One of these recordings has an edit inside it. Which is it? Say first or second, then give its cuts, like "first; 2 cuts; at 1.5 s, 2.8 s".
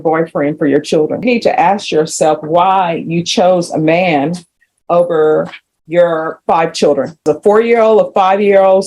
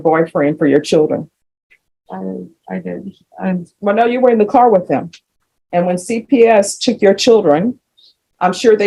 first; 2 cuts; at 1.2 s, 7.3 s